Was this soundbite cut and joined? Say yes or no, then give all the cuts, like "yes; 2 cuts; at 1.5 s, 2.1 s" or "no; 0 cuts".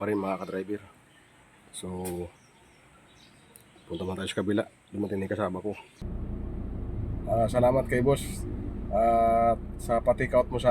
yes; 1 cut; at 6.0 s